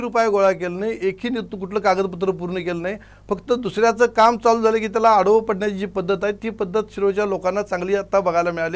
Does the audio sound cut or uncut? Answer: uncut